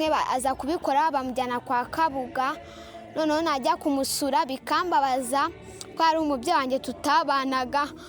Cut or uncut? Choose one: uncut